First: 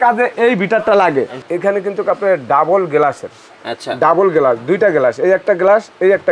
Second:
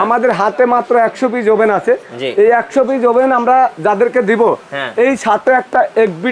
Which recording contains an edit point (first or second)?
first